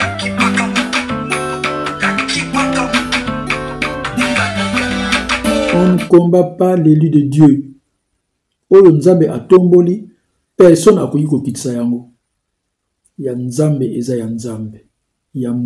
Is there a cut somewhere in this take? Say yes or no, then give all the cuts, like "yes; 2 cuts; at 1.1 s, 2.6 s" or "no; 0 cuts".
yes; 1 cut; at 5.7 s